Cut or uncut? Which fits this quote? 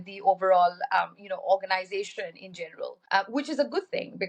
cut